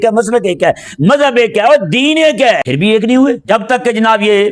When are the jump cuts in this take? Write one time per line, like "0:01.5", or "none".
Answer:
0:02.6
0:03.4